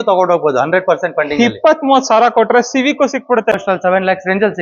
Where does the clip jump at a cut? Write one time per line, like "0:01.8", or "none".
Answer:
0:03.5